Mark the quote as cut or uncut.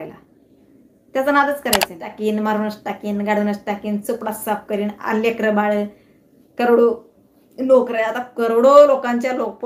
cut